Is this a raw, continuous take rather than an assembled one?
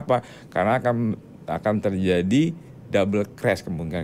yes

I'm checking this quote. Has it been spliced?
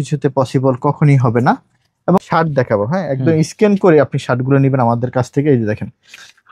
yes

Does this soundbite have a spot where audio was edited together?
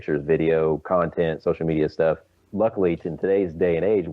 yes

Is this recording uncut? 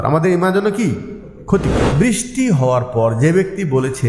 no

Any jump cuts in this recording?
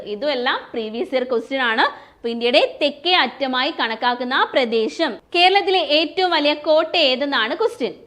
yes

